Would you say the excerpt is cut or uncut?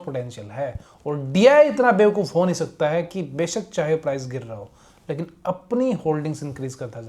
uncut